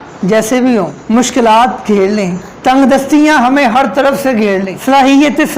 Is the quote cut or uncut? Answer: cut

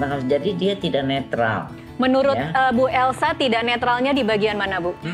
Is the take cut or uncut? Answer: uncut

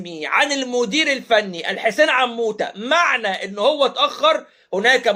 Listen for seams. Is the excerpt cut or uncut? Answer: uncut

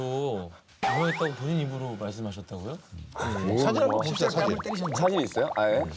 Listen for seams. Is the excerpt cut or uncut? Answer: uncut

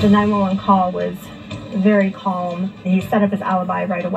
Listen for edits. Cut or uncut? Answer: cut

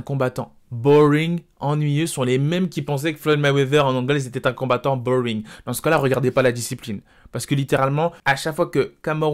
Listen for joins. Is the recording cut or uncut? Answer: cut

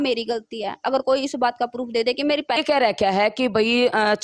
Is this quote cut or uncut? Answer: cut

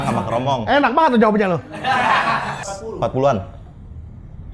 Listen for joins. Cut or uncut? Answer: cut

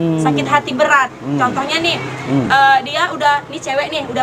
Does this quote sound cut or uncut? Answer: uncut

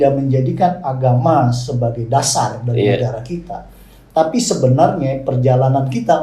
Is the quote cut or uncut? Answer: uncut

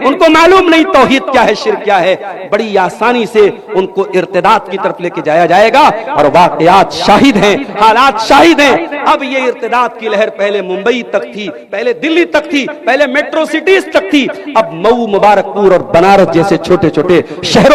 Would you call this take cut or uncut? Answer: uncut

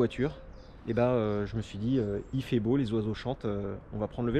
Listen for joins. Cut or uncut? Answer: uncut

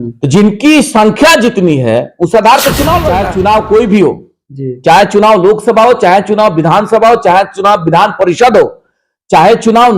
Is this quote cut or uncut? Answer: cut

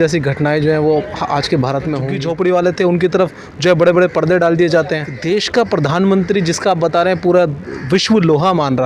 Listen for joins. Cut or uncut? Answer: cut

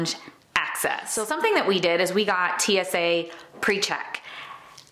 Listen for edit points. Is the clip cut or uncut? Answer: cut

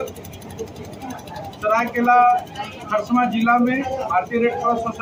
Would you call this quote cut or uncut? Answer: uncut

